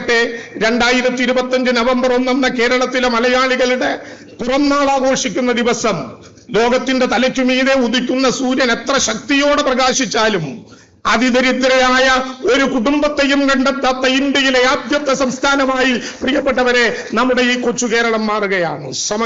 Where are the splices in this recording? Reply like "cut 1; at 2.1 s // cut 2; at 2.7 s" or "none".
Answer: none

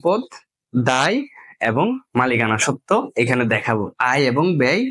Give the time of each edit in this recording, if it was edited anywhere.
none

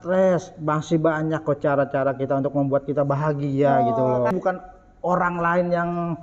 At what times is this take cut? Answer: cut 1; at 4.3 s

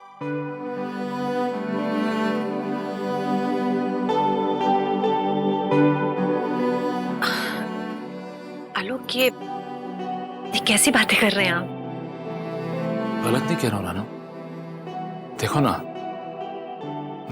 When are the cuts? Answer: none

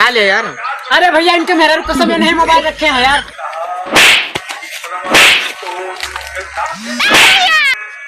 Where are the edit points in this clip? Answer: cut 1; at 3.3 s // cut 2; at 6.8 s

